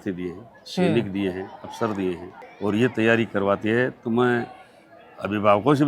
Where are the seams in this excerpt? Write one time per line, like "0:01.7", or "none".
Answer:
none